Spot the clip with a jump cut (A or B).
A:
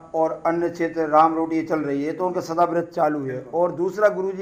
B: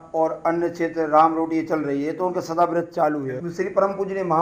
B